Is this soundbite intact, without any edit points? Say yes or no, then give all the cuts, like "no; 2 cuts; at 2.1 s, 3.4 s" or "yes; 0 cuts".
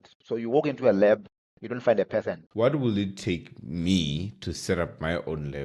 no; 1 cut; at 2.4 s